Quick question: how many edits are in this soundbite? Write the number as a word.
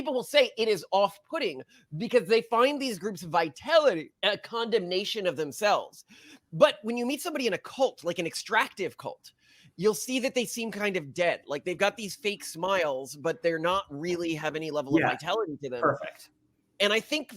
one